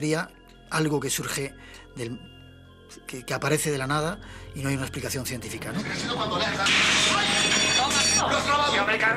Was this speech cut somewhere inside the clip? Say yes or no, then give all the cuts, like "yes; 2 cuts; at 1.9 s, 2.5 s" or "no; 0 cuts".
yes; 1 cut; at 5.9 s